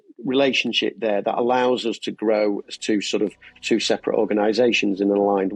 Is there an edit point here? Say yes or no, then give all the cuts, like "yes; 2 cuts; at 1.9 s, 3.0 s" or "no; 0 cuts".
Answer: no; 0 cuts